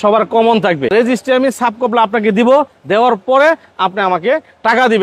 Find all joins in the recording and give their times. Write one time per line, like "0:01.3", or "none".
0:00.9